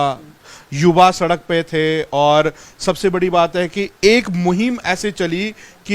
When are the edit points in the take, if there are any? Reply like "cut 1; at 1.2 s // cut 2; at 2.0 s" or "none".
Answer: none

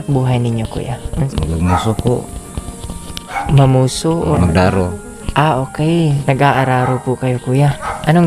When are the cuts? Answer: cut 1; at 1.3 s // cut 2; at 4.3 s // cut 3; at 6.2 s

